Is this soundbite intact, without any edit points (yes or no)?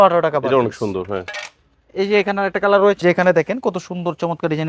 no